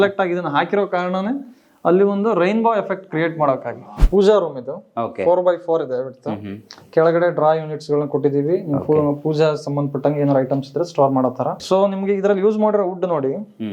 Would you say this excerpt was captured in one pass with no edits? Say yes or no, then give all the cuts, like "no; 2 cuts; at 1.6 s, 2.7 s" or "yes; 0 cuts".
no; 2 cuts; at 3.9 s, 11.6 s